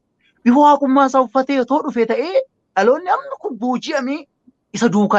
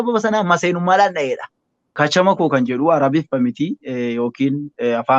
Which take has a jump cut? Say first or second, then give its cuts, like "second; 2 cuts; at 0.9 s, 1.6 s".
second; 1 cut; at 1.9 s